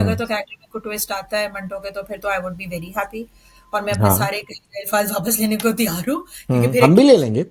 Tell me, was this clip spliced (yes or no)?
no